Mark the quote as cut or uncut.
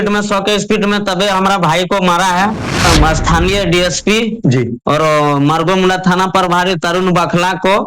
cut